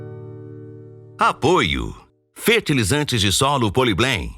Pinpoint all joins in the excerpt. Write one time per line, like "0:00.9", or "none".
0:01.0